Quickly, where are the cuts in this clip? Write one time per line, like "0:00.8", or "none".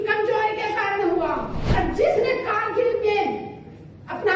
0:01.6